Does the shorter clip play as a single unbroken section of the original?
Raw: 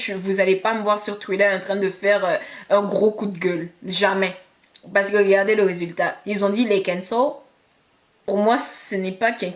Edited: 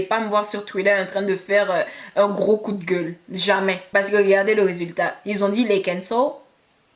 no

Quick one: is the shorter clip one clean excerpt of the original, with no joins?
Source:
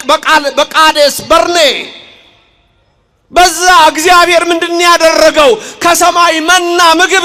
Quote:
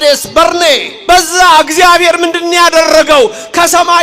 no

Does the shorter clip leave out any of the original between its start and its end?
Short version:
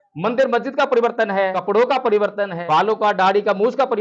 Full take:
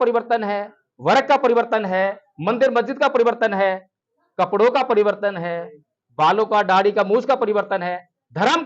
yes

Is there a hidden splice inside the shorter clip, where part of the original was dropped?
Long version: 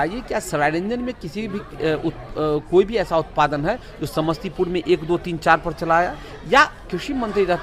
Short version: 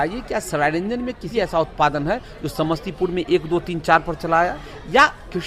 yes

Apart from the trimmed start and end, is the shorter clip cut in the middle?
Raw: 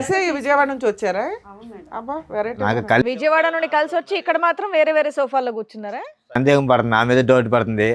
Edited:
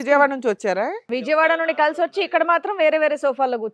yes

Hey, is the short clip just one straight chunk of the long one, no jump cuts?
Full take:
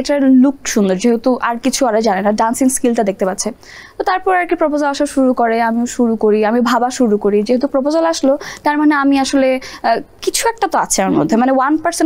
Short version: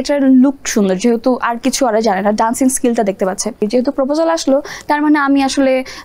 no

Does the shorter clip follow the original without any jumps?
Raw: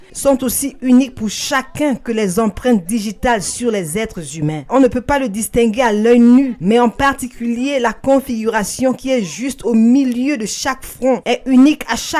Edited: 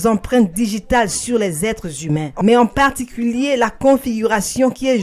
no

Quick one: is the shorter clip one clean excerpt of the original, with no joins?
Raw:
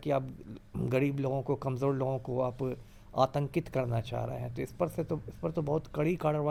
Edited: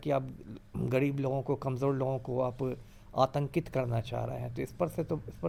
yes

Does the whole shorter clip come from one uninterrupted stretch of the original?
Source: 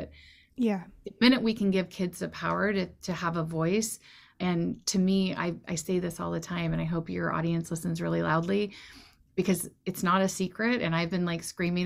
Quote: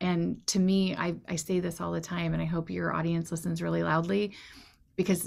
yes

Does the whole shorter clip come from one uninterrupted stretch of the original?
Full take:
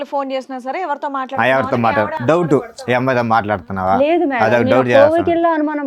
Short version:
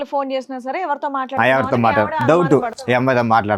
yes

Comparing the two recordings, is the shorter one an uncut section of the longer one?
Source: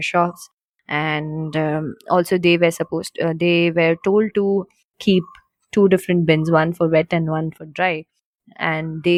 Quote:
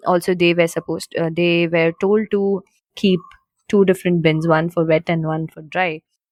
yes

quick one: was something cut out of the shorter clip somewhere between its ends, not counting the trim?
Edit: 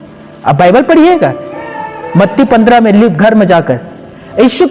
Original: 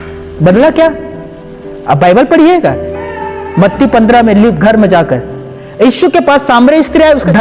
no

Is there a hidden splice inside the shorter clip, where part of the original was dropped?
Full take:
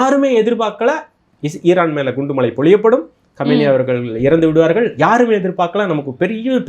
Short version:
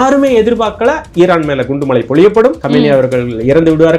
yes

